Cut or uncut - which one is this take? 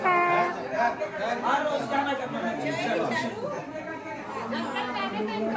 uncut